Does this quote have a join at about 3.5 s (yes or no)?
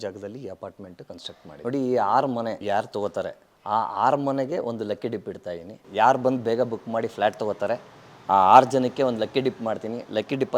no